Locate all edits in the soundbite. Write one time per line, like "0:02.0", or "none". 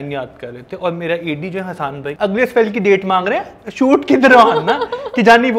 0:02.2